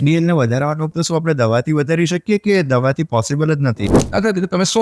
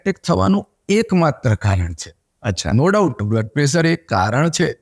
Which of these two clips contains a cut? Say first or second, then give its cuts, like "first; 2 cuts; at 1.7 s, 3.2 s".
first; 2 cuts; at 0.9 s, 4.0 s